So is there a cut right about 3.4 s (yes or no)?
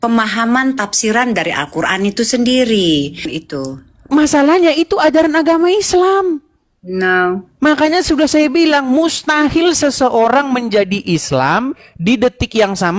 yes